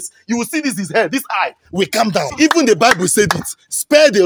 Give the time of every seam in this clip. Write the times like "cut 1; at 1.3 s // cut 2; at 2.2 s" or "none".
cut 1; at 2.3 s